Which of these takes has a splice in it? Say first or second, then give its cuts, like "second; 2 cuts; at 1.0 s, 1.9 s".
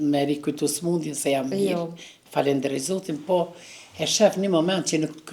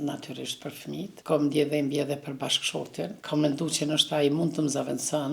second; 2 cuts; at 1.1 s, 3.2 s